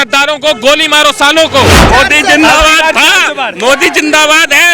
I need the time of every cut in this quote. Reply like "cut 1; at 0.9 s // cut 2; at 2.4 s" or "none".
cut 1; at 1.8 s